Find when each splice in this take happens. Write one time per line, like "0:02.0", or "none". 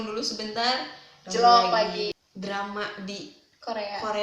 0:02.1